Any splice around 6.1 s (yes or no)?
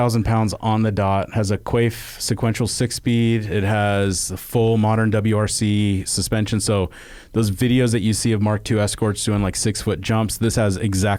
no